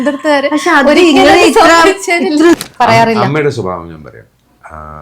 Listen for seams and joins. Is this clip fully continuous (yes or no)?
no